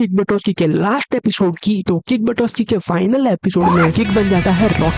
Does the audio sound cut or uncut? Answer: uncut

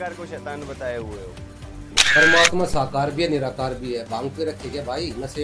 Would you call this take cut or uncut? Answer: cut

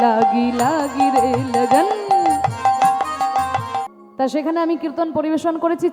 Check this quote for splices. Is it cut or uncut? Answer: cut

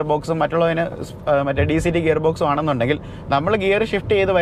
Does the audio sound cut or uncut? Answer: uncut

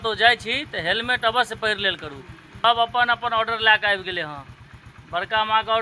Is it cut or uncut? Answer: cut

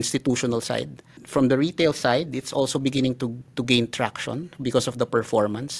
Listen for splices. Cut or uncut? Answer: uncut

